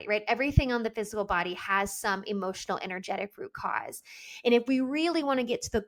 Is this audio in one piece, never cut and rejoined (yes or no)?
yes